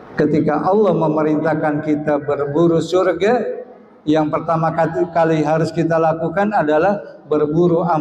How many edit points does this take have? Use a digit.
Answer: 0